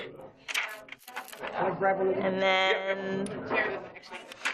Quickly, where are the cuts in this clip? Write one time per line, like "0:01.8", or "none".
0:03.3